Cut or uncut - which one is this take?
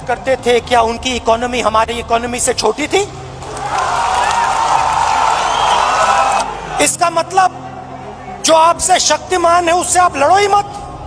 uncut